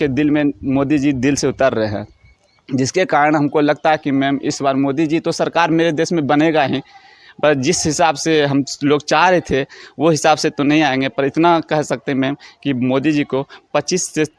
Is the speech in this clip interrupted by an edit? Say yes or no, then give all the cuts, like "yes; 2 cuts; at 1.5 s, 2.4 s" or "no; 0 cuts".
no; 0 cuts